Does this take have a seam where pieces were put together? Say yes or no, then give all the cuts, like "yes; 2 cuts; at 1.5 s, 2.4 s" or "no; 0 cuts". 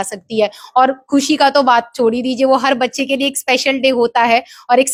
no; 0 cuts